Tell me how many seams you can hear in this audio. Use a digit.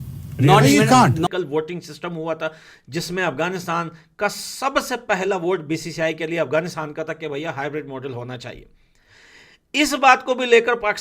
1